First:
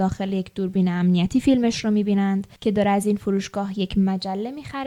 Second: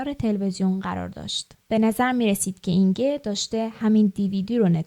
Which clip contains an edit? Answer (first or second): second